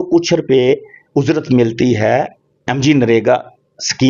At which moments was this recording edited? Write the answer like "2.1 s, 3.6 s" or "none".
none